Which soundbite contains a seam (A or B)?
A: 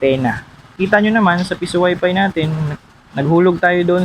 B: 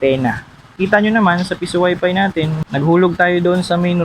B